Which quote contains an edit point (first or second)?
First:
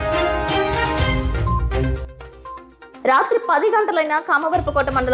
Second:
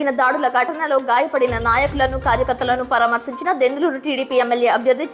first